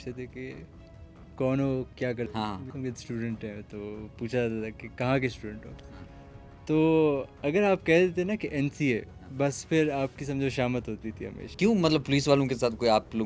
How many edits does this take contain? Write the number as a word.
zero